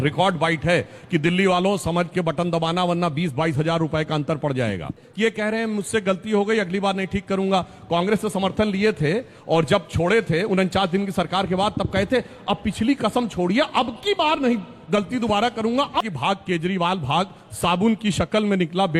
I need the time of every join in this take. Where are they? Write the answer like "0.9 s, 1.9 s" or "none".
5.0 s, 16.0 s